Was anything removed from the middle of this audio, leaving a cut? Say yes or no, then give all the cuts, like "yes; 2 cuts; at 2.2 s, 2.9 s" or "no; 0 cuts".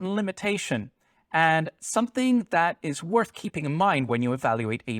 no; 0 cuts